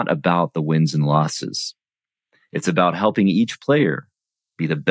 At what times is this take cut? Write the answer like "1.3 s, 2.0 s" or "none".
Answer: none